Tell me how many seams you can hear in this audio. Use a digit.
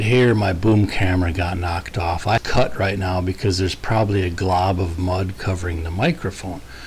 1